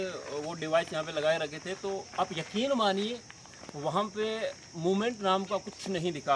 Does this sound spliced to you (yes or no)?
no